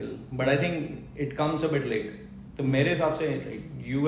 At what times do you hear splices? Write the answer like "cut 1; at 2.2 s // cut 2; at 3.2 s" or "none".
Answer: none